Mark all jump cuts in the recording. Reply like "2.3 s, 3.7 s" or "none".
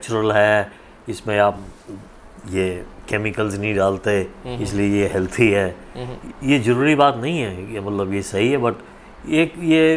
none